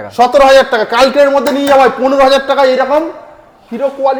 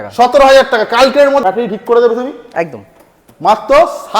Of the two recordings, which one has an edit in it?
second; 1 cut; at 1.4 s

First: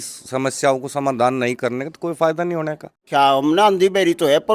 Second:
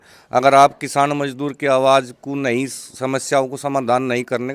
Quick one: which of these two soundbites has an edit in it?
first; 1 cut; at 3.0 s

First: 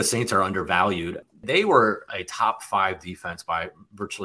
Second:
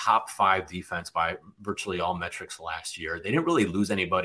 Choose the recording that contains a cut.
first; 1 cut; at 1.4 s

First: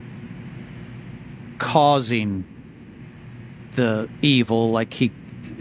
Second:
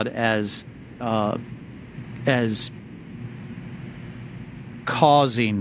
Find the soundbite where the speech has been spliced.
second; 1 cut; at 1.0 s

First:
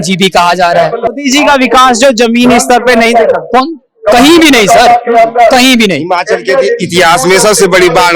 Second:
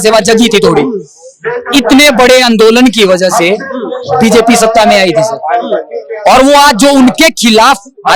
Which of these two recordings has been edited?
first; 1 cut; at 1.1 s

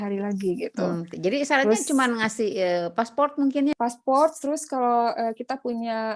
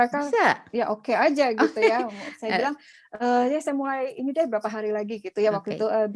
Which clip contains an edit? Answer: first; 1 cut; at 3.7 s

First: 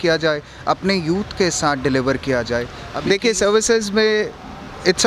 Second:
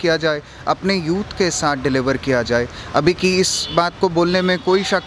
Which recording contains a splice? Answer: first; 1 cut; at 2.8 s

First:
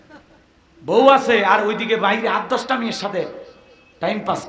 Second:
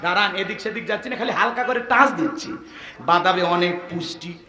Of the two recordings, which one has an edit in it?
second; 1 cut; at 2.8 s

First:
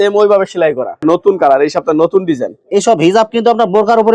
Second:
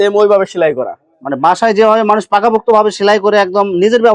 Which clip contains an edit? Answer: first; 1 cut; at 1.0 s

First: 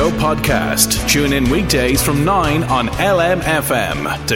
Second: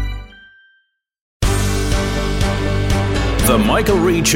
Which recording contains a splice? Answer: second; 1 cut; at 1.2 s

